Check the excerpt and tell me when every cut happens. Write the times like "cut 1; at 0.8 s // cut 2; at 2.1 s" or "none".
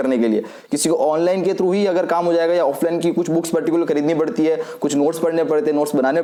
none